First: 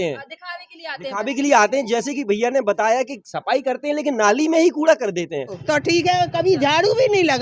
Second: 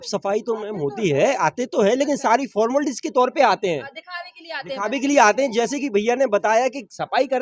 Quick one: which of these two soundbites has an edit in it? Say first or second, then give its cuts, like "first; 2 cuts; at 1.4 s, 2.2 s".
first; 1 cut; at 5.6 s